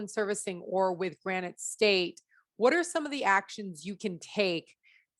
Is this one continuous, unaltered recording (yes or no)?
yes